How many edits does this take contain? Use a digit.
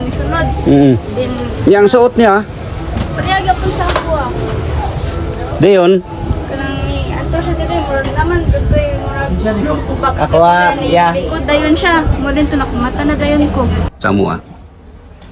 1